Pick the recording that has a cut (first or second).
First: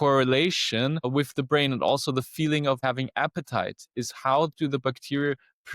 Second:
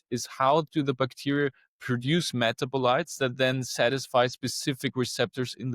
first